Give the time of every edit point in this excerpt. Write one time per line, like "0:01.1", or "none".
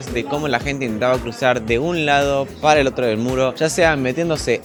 none